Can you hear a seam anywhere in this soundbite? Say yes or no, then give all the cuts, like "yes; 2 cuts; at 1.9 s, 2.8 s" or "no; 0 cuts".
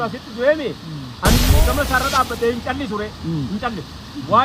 yes; 1 cut; at 1.5 s